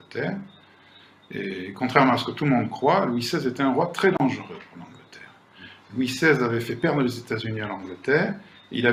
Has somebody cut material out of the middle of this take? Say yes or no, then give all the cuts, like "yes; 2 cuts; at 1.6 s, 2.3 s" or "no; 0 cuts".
no; 0 cuts